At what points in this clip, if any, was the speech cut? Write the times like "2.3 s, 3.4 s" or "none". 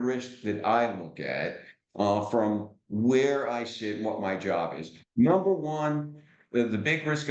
none